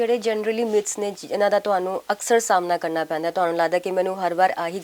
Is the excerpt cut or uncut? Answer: uncut